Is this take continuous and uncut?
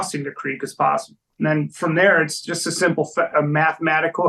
no; 1 cut; at 1.2 s

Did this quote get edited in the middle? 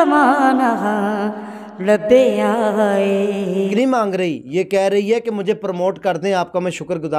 yes; 1 cut; at 3.7 s

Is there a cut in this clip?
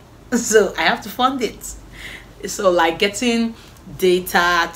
no; 0 cuts

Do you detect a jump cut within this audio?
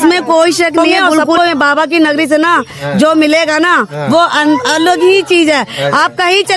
yes; 1 cut; at 1.4 s

